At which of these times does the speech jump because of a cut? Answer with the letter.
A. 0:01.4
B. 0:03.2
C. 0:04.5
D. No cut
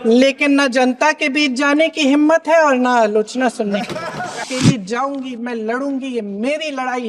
C